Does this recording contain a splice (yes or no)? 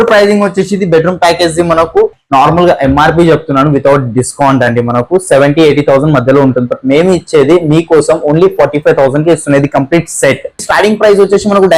yes